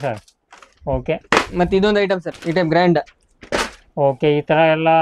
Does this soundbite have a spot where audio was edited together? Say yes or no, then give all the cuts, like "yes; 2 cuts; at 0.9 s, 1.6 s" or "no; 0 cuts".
yes; 1 cut; at 2.3 s